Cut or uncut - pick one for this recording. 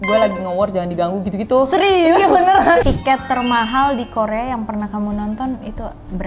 cut